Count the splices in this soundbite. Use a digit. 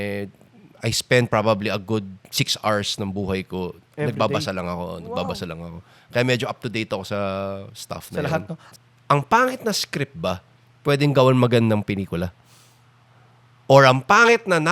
1